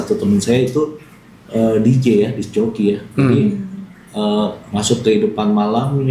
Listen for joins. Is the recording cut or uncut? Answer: uncut